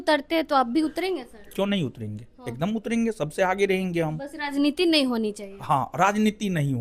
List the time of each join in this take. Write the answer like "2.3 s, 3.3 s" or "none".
none